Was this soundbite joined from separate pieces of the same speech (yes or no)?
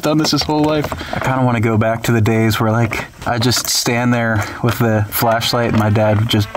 yes